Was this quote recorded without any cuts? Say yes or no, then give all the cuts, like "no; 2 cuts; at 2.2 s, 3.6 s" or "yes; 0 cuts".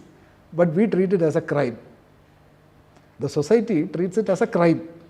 yes; 0 cuts